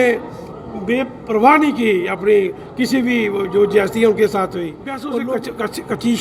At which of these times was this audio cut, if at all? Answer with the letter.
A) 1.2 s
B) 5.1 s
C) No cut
B